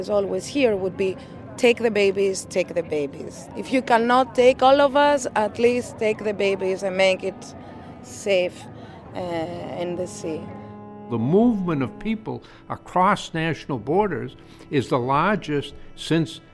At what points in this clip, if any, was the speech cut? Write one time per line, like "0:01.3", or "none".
0:03.4
0:11.0